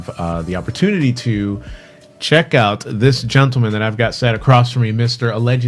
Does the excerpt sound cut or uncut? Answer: cut